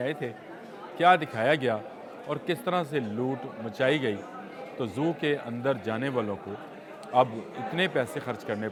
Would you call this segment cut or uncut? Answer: uncut